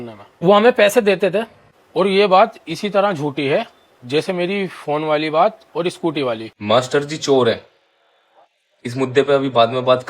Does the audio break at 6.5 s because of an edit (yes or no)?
yes